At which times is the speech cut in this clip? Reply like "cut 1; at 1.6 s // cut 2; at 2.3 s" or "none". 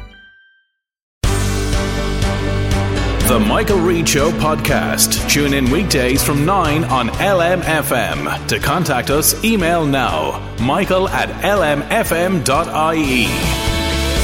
cut 1; at 1.1 s